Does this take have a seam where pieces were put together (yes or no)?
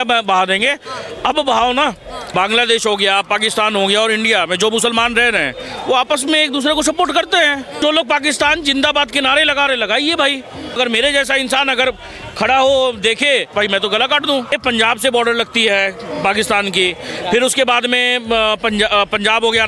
yes